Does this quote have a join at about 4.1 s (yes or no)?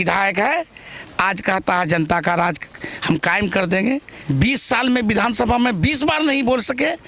yes